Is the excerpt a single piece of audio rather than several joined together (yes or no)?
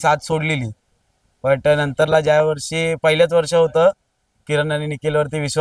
yes